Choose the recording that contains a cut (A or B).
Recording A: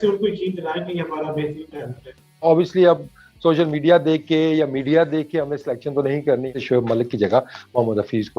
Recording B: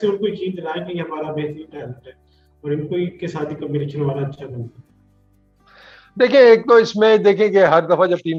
A